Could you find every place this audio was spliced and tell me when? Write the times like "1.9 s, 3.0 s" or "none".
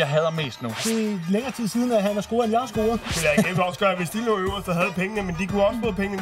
0.8 s, 3.1 s